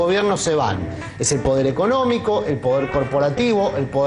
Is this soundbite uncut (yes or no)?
yes